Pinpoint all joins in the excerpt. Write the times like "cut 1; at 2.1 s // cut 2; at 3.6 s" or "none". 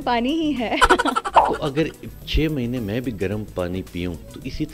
cut 1; at 1.4 s